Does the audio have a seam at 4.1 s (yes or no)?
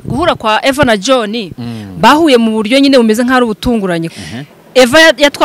yes